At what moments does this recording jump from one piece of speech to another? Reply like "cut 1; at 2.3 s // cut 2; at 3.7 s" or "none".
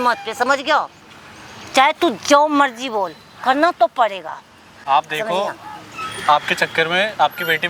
none